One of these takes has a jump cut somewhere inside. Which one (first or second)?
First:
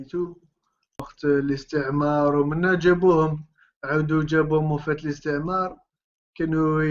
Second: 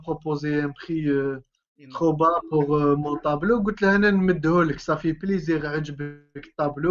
first